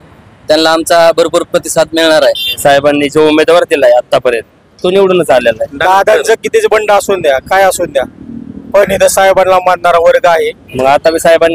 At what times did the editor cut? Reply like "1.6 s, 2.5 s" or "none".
2.5 s, 5.8 s, 10.6 s